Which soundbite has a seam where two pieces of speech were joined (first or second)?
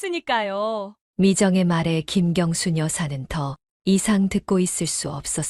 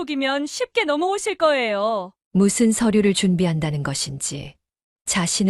second